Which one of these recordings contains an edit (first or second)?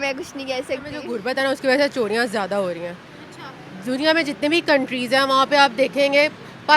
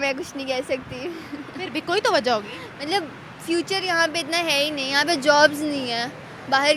first